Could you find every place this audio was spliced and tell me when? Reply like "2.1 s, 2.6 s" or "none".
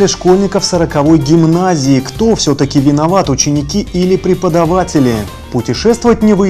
5.4 s